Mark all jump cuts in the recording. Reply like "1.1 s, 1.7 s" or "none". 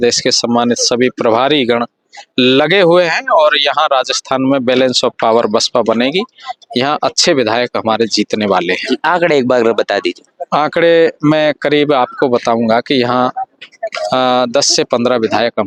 none